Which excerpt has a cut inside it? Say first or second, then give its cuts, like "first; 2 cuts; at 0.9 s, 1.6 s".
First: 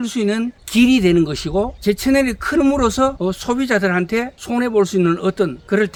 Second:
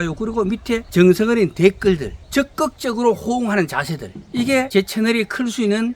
second; 3 cuts; at 0.9 s, 2.2 s, 4.5 s